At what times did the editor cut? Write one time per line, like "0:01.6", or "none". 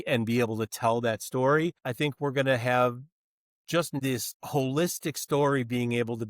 0:01.8
0:04.0